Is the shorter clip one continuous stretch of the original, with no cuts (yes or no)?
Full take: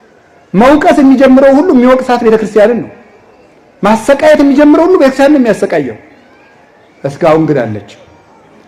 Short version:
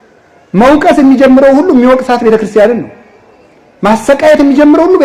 yes